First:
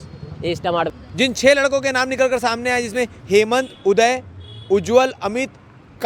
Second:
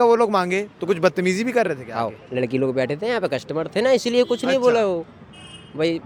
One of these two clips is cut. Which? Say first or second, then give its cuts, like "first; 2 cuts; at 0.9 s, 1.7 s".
first; 1 cut; at 0.9 s